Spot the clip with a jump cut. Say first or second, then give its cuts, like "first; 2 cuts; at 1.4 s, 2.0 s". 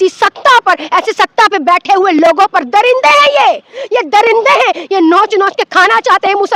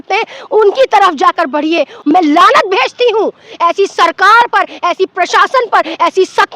second; 1 cut; at 1.9 s